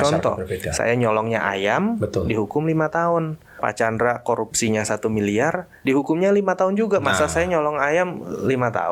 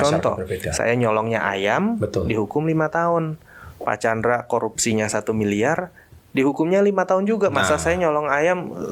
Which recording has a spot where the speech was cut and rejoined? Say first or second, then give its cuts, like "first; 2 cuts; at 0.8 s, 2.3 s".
first; 2 cuts; at 3.4 s, 5.7 s